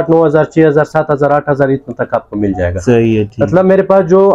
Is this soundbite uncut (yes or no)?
yes